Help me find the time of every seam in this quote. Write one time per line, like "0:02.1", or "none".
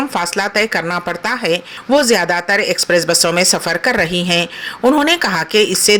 0:01.7